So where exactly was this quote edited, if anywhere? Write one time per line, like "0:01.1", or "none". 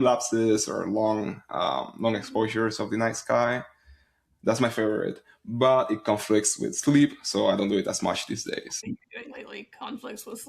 0:08.8